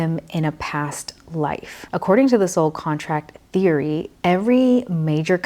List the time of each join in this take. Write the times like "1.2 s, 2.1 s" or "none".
1.7 s, 4.2 s